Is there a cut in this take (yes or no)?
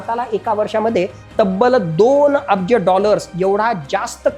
no